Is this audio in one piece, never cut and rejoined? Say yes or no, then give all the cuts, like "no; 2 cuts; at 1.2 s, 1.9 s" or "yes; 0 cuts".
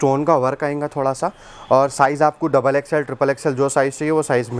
yes; 0 cuts